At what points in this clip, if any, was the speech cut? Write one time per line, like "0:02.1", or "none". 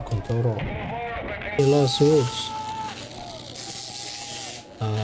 0:01.6